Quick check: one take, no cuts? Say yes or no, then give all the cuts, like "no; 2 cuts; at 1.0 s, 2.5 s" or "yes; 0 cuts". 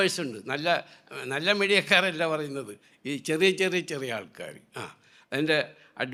yes; 0 cuts